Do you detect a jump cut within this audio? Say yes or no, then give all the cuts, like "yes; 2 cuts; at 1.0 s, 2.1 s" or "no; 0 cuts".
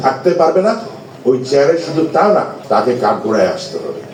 no; 0 cuts